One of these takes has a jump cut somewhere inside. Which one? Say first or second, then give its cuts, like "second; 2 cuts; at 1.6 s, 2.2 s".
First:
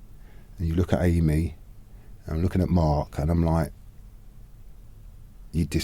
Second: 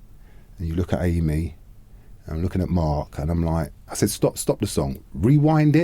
second; 1 cut; at 3.9 s